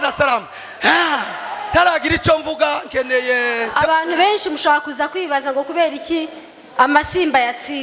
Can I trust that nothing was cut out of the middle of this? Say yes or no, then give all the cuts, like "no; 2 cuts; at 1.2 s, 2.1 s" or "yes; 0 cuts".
no; 1 cut; at 3.7 s